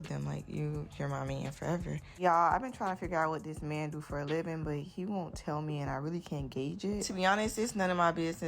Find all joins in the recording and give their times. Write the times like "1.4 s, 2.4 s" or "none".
1.7 s, 4.9 s